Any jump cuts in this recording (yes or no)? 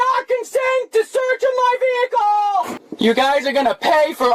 yes